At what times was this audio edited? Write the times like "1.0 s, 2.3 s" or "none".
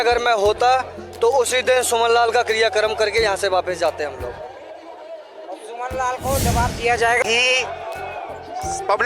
7.2 s